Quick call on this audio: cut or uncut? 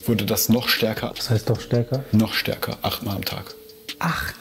cut